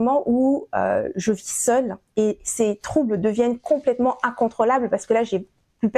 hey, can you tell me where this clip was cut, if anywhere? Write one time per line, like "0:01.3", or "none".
none